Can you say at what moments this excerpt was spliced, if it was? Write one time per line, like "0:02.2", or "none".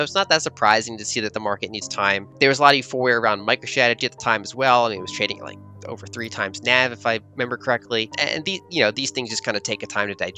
0:02.3
0:08.2